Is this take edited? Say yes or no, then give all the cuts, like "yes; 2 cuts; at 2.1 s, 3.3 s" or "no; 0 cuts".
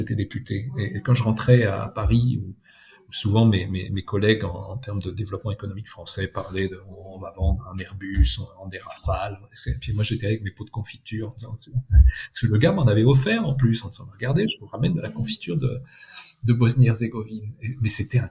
no; 0 cuts